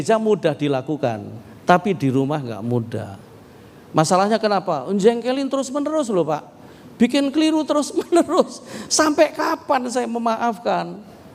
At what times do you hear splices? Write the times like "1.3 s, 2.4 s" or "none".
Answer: none